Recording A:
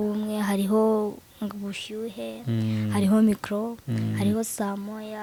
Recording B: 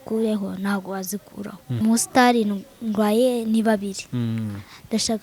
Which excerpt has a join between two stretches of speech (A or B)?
B